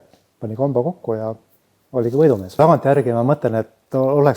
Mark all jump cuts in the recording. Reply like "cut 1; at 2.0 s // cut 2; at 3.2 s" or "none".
cut 1; at 2.6 s